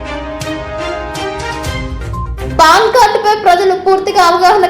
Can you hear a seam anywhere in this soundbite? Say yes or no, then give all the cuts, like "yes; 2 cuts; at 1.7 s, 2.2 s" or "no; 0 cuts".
yes; 1 cut; at 2.4 s